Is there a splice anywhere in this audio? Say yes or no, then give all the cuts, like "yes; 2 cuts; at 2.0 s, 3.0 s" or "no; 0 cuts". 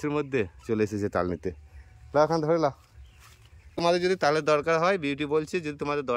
yes; 1 cut; at 3.8 s